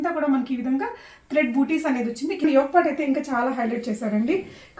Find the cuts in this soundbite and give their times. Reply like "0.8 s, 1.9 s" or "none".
2.4 s